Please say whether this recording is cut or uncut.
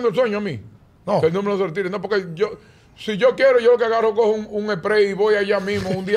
uncut